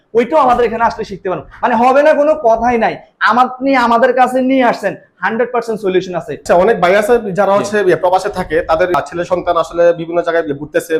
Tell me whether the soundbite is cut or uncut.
uncut